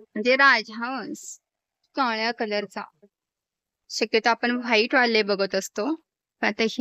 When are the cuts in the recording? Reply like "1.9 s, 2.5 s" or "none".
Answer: none